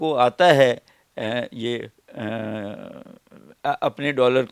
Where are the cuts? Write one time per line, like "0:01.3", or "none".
none

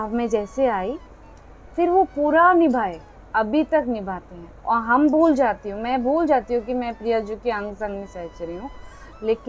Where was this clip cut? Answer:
none

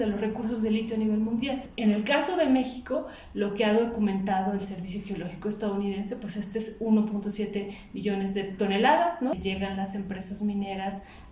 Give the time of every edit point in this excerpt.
0:01.7
0:09.3

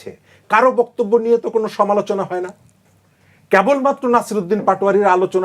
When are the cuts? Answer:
none

